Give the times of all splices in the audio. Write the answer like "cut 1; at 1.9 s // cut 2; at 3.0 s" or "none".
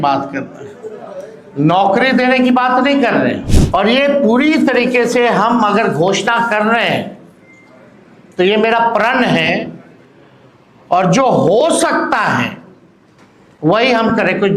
cut 1; at 3.5 s

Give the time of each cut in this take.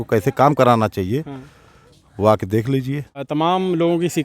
cut 1; at 3.2 s

